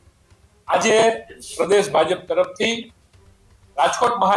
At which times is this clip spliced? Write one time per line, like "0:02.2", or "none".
none